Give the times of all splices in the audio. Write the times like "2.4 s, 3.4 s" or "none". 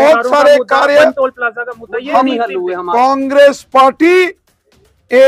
2.8 s

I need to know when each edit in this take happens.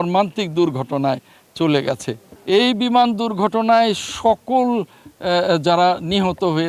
2.3 s

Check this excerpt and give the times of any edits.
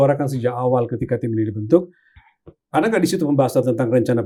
none

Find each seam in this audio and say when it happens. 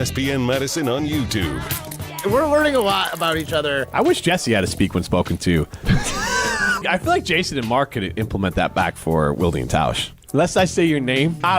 2.0 s

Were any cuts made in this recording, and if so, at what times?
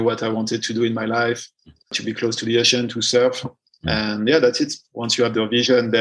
1.7 s

